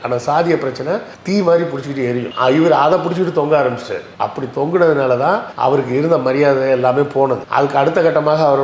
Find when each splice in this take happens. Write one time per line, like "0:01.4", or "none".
none